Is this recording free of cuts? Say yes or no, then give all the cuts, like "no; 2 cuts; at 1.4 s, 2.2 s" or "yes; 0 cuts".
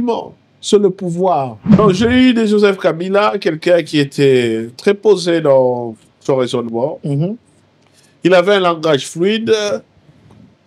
no; 1 cut; at 1.6 s